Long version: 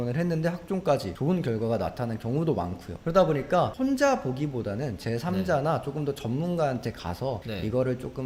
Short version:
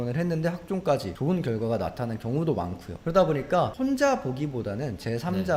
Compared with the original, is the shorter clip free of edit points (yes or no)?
yes